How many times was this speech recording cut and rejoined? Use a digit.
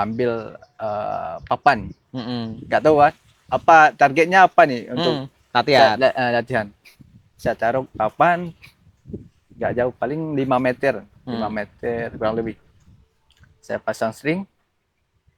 0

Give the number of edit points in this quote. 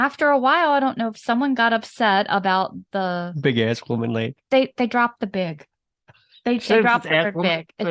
0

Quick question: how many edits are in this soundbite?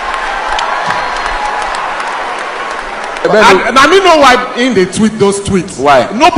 1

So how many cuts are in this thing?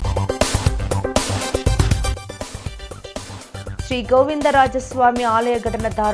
1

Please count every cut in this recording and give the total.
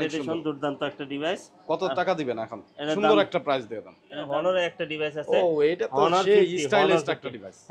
1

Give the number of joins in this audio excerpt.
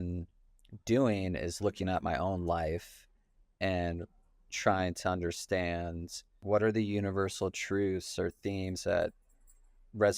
1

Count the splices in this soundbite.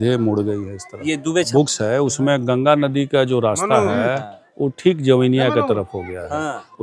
1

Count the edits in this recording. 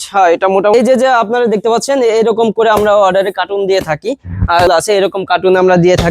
2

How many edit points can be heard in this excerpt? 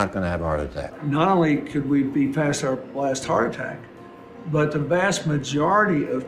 1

